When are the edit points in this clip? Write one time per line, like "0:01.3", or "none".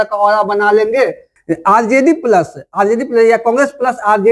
0:01.3